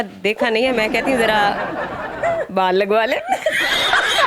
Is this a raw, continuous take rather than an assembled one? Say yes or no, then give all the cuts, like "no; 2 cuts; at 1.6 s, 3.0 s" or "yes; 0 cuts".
yes; 0 cuts